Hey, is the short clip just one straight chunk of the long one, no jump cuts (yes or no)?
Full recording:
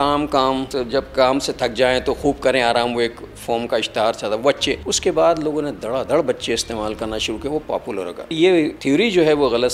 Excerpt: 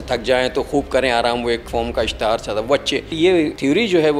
no